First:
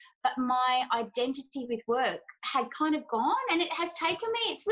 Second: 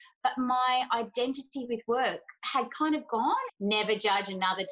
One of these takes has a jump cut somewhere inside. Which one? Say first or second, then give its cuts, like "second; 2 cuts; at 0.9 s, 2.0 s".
second; 1 cut; at 3.5 s